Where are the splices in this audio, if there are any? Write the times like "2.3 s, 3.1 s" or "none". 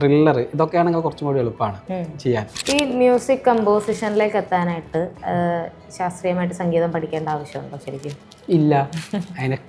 2.5 s